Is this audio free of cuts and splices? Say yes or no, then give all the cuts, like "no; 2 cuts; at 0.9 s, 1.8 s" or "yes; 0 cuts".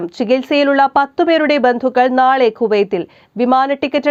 yes; 0 cuts